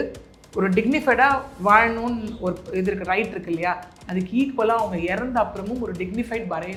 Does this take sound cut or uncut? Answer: uncut